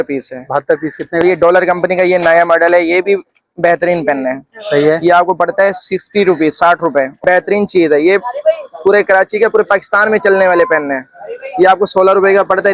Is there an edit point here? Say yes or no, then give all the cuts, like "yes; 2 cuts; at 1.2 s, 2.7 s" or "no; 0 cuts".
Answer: yes; 2 cuts; at 1.2 s, 7.2 s